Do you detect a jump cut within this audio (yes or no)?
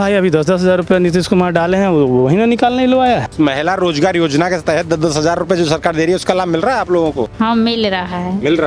yes